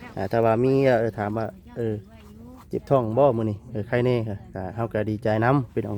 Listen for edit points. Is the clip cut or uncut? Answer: uncut